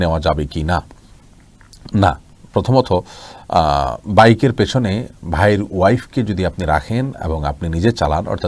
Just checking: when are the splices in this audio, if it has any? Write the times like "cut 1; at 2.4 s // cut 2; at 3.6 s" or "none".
none